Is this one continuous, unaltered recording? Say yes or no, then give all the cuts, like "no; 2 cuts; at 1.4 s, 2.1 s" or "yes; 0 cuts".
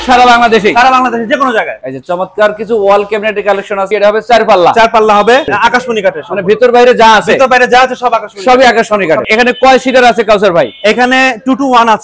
no; 4 cuts; at 1.9 s, 3.9 s, 5.5 s, 9.2 s